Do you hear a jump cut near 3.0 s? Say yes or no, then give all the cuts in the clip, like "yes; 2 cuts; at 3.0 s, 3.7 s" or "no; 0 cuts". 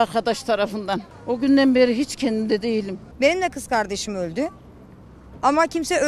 yes; 2 cuts; at 1.1 s, 3.0 s